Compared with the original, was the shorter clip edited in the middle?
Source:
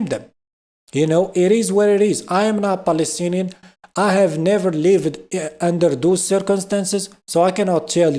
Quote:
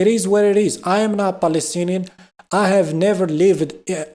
no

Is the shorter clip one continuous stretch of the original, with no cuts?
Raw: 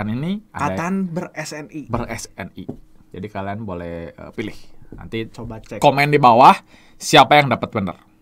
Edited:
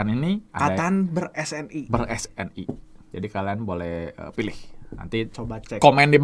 yes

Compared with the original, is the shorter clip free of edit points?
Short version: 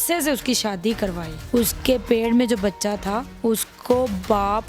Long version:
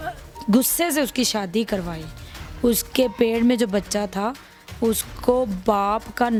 no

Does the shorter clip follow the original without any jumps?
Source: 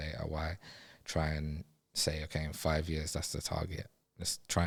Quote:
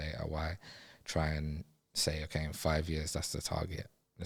yes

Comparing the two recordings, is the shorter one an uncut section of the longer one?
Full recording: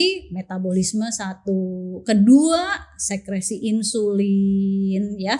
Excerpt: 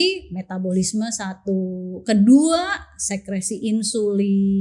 yes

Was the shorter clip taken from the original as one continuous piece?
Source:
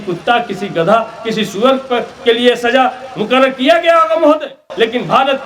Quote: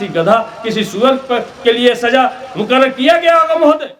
yes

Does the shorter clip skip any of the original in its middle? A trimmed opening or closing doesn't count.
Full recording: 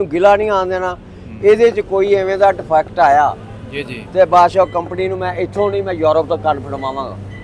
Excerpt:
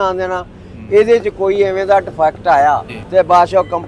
yes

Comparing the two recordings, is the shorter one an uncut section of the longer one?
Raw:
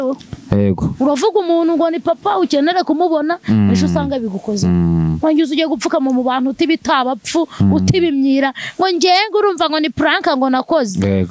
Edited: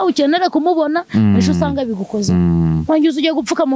yes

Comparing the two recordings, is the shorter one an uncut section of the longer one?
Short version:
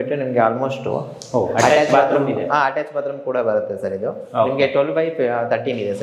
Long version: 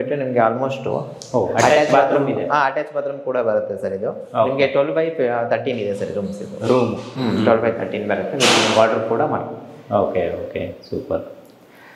yes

